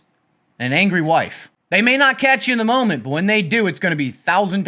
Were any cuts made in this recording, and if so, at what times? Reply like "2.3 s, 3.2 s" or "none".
none